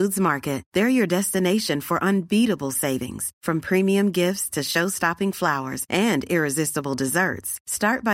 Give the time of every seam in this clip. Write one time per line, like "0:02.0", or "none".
none